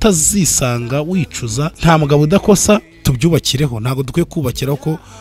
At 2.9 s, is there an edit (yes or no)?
yes